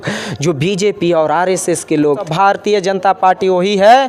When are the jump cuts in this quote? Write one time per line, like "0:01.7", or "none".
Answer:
0:02.2